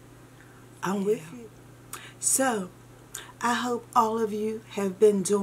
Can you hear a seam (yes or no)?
yes